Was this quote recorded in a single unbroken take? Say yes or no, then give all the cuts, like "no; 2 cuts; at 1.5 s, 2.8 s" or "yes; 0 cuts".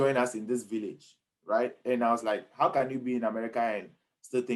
yes; 0 cuts